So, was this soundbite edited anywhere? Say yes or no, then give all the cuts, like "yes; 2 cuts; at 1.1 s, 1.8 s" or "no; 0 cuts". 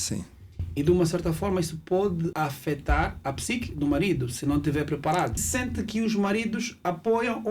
yes; 2 cuts; at 2.3 s, 5.5 s